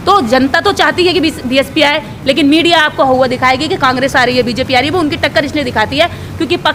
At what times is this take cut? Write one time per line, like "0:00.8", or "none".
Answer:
none